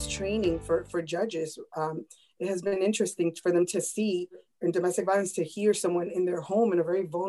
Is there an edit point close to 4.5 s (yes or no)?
yes